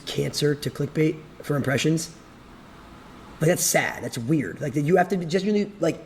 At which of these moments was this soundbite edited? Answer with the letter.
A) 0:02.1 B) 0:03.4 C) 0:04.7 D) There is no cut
D